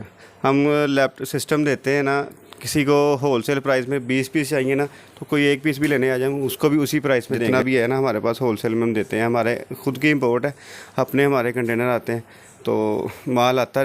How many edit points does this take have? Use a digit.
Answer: 1